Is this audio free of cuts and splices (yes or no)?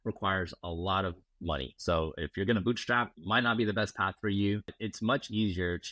no